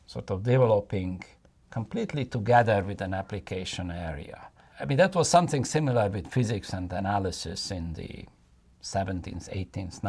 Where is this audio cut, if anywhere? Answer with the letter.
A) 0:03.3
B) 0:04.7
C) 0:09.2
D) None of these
B